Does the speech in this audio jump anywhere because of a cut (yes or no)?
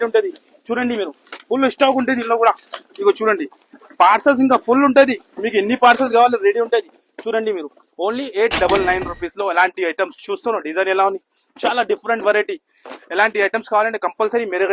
no